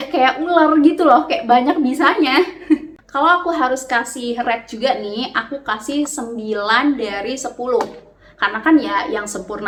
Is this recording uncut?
yes; 0 cuts

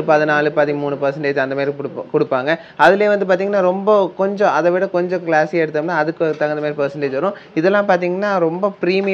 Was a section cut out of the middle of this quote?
no; 0 cuts

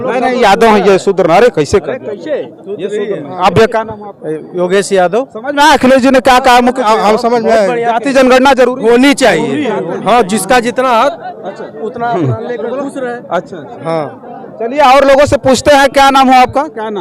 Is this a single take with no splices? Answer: yes; 0 cuts

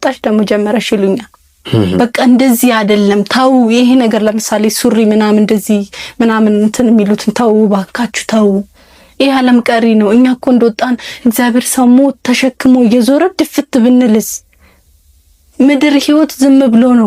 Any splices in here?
no; 0 cuts

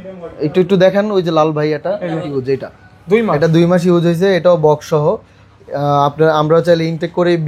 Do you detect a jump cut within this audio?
yes; 1 cut; at 2.3 s

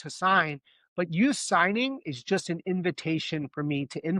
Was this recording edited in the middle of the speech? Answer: no; 0 cuts

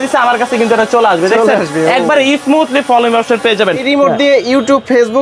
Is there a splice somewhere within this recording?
yes; 1 cut; at 3.8 s

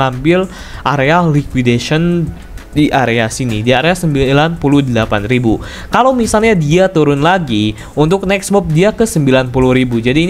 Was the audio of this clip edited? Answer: no; 0 cuts

